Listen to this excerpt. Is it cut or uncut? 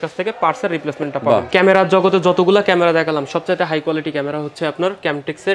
cut